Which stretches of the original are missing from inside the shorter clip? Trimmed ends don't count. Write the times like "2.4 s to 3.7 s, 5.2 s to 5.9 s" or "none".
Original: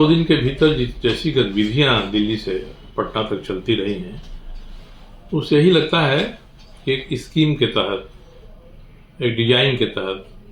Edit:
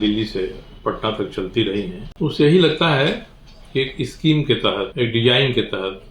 4.1 s to 5.1 s, 8.0 s to 9.1 s